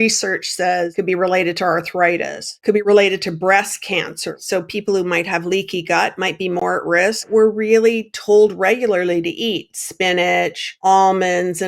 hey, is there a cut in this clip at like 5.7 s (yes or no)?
no